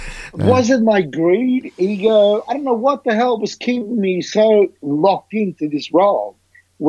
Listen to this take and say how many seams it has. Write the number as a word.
zero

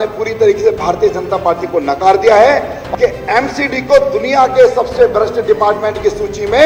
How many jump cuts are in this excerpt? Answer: one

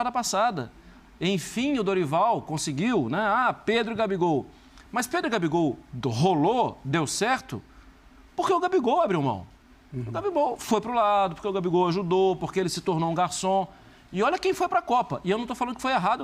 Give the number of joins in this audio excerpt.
zero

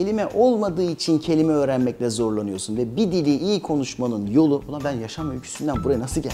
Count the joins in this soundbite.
zero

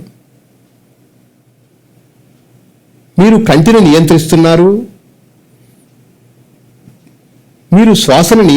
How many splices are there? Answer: one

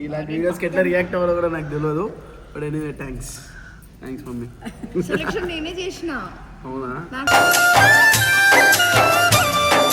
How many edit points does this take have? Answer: zero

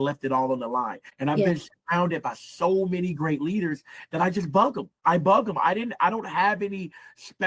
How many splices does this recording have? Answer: two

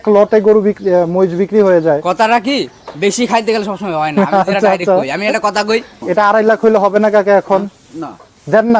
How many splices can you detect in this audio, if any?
one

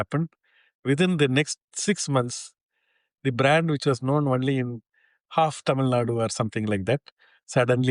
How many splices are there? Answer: one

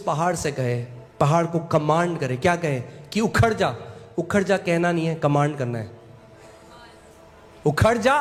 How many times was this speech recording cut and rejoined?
zero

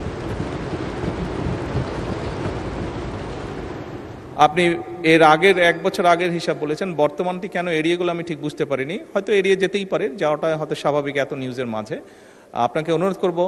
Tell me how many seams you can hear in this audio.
zero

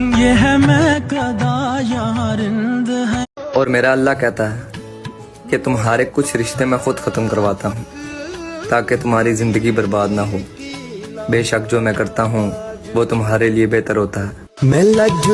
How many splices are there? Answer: zero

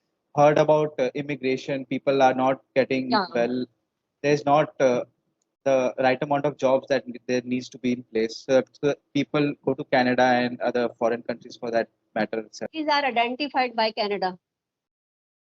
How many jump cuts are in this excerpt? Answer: one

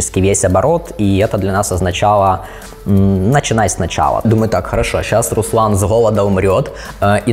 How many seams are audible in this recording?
one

